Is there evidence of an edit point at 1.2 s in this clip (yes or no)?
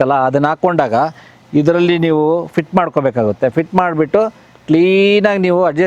no